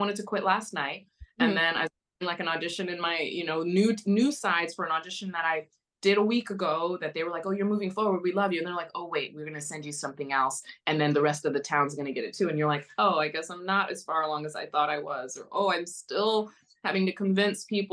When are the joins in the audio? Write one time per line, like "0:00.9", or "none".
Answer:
none